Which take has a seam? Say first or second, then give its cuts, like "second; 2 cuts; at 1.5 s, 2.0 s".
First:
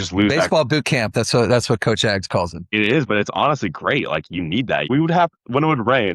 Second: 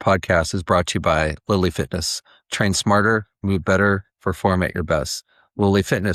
first; 2 cuts; at 2.6 s, 4.8 s